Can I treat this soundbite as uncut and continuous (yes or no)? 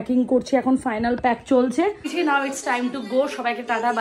no